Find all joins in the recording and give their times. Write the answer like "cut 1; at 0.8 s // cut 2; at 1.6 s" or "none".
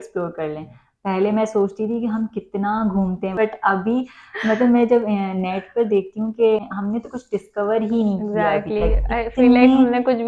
cut 1; at 3.4 s